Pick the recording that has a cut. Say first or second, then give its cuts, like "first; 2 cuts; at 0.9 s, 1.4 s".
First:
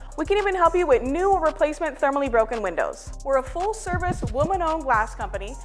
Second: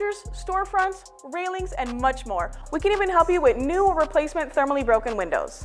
first; 1 cut; at 4.6 s